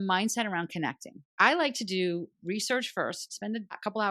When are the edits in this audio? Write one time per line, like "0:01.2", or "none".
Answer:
0:01.3

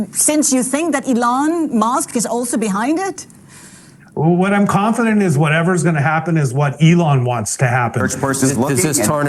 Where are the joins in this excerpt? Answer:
0:08.2

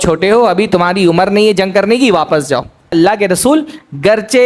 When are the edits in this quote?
0:02.9

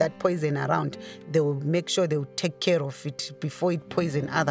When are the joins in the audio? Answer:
none

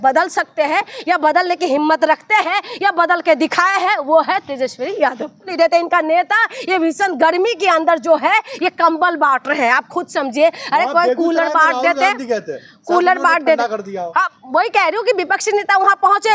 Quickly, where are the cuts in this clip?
0:05.5

